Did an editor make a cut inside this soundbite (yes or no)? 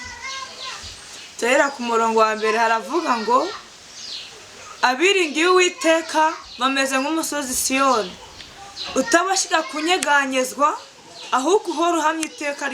no